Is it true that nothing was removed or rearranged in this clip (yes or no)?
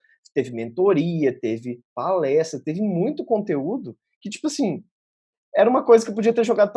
yes